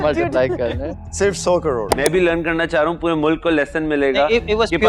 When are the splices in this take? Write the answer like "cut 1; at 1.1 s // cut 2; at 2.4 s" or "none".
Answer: cut 1; at 1.9 s